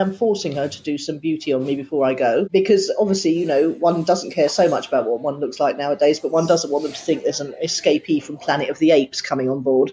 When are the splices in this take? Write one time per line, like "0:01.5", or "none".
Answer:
0:02.5